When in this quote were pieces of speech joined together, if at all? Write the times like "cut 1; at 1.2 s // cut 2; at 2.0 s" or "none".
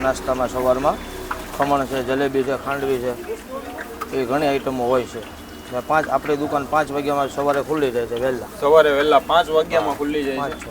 none